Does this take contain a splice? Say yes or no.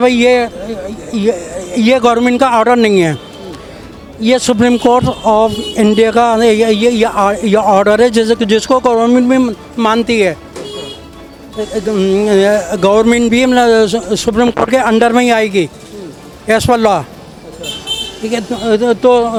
no